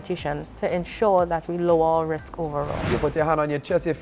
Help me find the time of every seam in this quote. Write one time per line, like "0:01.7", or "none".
0:02.9

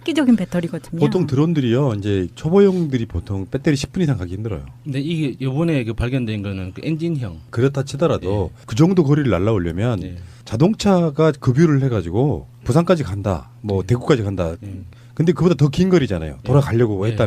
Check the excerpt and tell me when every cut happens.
0:09.3

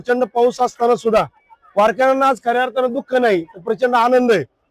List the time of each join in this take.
none

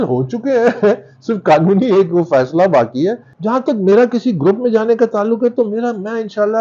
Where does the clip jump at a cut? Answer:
0:03.3

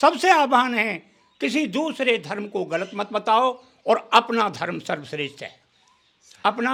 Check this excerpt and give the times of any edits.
none

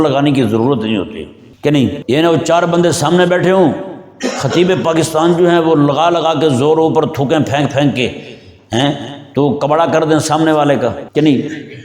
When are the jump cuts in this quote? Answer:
0:01.9
0:11.0

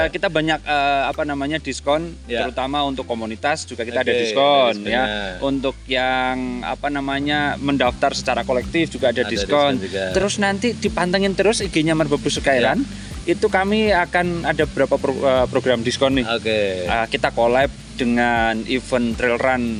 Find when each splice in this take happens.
none

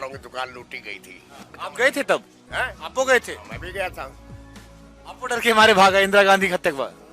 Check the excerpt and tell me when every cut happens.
0:01.6

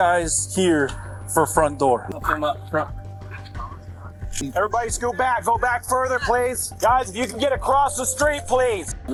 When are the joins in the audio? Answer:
none

